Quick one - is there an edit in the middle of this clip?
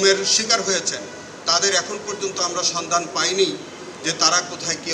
no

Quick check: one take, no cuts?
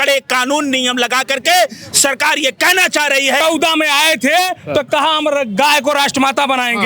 no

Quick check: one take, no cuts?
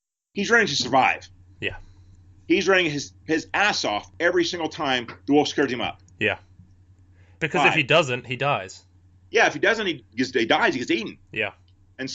no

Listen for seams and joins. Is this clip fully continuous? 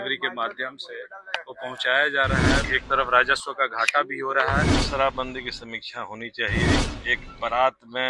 no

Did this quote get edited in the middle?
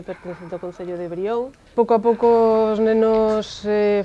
yes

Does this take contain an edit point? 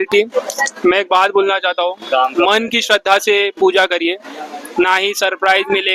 no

